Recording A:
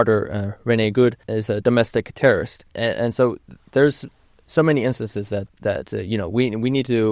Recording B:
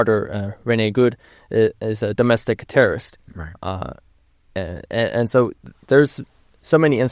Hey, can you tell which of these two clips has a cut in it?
A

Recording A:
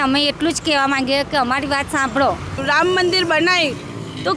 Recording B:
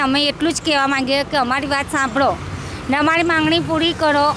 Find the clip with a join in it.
A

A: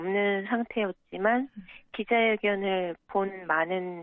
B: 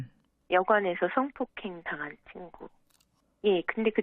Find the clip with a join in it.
A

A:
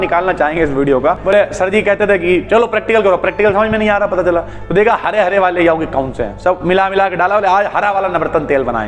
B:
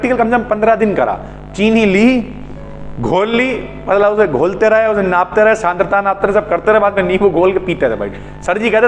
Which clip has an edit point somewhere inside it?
A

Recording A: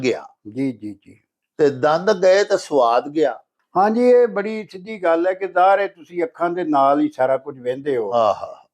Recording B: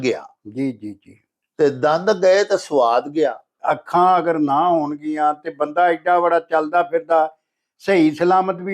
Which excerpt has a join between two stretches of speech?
B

